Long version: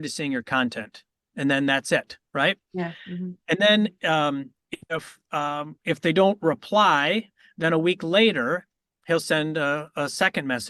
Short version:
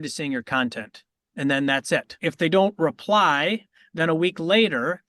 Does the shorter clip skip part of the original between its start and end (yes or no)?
yes